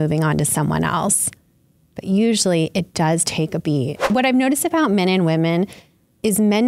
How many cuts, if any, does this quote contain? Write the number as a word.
one